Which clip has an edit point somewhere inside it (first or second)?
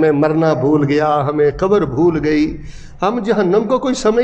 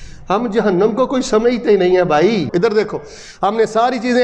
second